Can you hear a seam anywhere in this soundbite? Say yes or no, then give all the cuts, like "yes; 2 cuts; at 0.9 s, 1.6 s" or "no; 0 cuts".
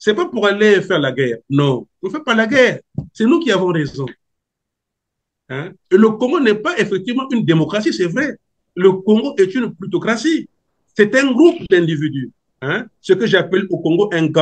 no; 0 cuts